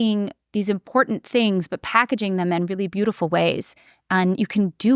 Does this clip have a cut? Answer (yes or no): no